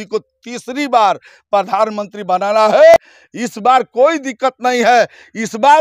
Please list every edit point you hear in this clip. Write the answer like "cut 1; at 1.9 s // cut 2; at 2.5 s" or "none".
cut 1; at 3.0 s